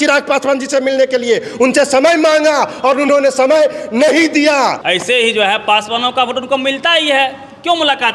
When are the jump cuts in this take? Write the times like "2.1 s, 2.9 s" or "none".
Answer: 4.8 s